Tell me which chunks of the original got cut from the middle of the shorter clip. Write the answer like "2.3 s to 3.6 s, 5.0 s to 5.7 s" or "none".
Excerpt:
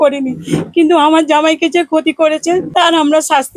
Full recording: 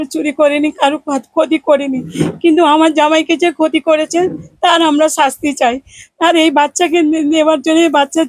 4.3 s to 4.5 s